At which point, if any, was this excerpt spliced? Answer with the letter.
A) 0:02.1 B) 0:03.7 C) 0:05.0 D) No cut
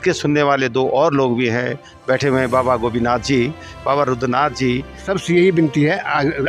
C